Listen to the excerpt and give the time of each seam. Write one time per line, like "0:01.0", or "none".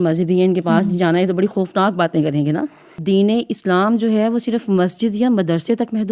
0:03.0